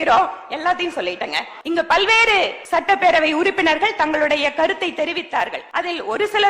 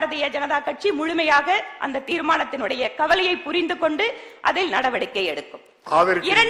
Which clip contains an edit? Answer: first; 3 cuts; at 1.5 s, 2.6 s, 5.6 s

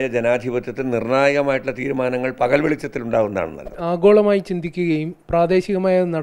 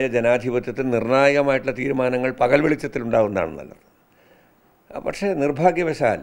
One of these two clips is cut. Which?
first; 1 cut; at 3.7 s

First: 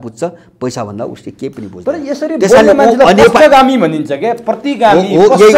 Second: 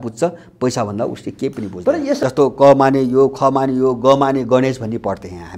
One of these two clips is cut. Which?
second; 1 cut; at 2.2 s

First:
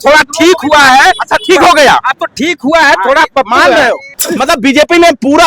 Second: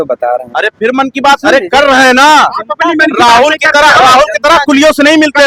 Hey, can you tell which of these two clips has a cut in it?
first; 1 cut; at 4.1 s

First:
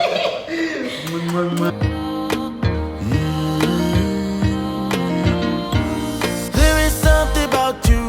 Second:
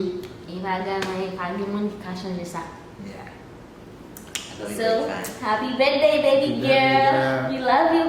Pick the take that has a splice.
first; 1 cut; at 1.7 s

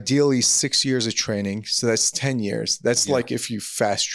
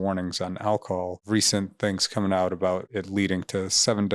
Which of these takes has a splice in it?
second; 2 cuts; at 1.2 s, 2.9 s

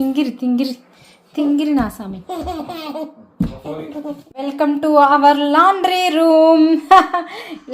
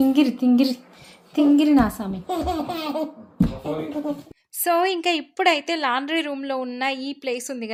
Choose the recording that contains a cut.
first; 1 cut; at 4.3 s

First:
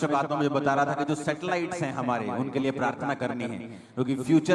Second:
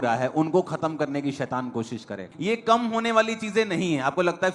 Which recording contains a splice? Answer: second; 1 cut; at 2.3 s

